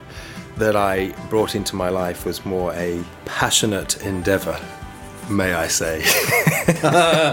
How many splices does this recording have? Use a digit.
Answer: 0